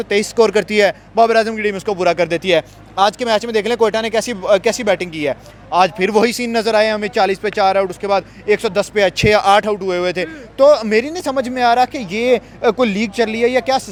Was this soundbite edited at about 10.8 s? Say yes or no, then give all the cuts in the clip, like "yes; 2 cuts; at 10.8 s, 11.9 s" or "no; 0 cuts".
no; 0 cuts